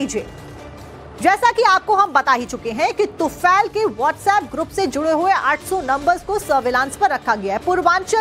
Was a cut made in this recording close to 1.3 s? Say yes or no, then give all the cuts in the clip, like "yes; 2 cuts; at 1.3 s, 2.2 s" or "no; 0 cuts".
no; 1 cut; at 3.7 s